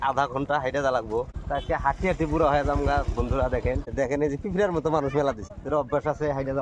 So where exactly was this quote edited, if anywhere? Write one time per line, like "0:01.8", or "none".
0:01.4
0:03.9
0:05.5